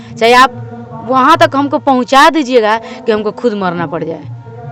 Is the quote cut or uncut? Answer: uncut